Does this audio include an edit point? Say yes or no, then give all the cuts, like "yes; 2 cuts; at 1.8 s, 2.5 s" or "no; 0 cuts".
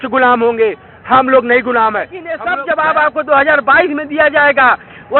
yes; 1 cut; at 2.2 s